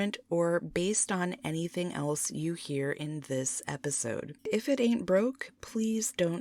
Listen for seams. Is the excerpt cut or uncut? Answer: cut